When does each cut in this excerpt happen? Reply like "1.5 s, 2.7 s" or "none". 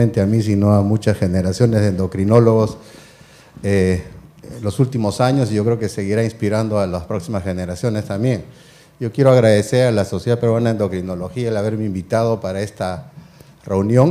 8.1 s